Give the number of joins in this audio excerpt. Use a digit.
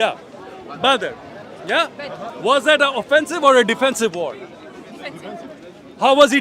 2